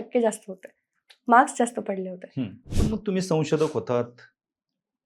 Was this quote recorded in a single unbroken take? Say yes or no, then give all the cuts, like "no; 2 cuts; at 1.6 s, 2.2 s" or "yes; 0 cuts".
no; 1 cut; at 2.6 s